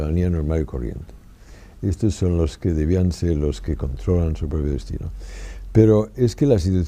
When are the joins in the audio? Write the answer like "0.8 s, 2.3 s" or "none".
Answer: 2.7 s